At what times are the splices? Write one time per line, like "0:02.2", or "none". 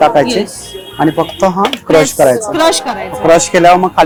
none